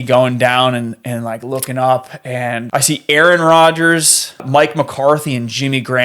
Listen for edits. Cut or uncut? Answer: cut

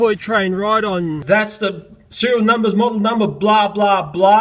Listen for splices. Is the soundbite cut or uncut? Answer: cut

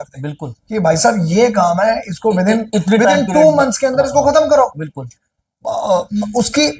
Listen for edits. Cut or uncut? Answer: uncut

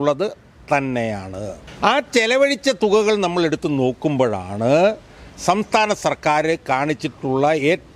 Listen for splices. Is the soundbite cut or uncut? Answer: cut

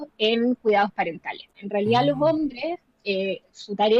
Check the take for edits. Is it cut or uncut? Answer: cut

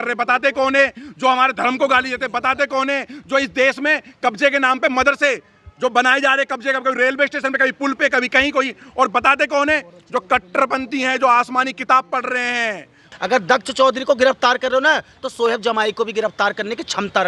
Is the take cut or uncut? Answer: cut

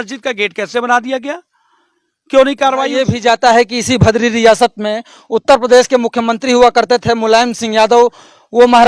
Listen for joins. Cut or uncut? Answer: cut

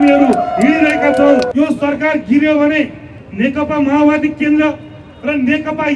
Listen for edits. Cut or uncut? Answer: cut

